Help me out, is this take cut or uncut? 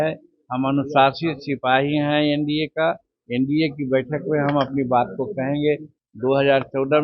cut